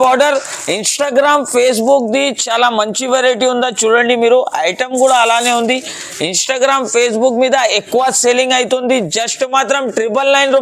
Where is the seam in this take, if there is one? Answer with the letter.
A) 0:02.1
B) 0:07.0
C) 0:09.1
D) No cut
D